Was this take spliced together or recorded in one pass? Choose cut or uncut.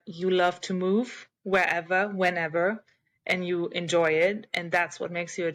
uncut